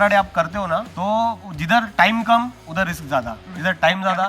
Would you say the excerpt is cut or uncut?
cut